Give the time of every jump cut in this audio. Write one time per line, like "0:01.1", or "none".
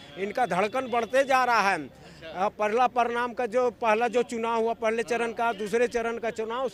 none